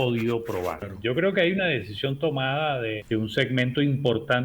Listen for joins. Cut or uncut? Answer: cut